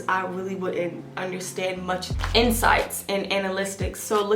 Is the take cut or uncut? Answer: cut